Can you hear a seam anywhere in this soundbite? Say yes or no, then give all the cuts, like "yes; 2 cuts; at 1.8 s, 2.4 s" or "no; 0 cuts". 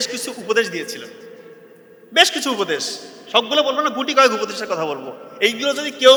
no; 0 cuts